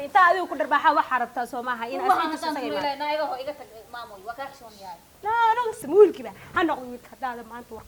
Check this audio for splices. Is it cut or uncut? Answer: cut